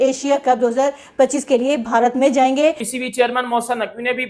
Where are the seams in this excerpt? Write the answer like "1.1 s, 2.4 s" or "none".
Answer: 2.8 s